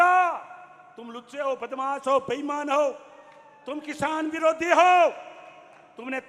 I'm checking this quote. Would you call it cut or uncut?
uncut